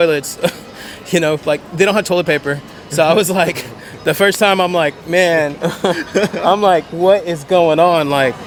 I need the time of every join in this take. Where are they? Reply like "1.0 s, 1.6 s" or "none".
none